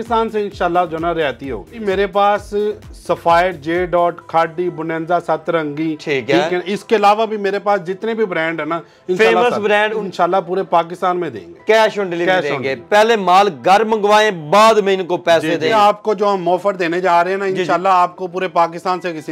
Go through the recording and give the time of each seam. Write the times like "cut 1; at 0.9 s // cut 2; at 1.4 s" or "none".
cut 1; at 1.8 s // cut 2; at 10.0 s // cut 3; at 15.7 s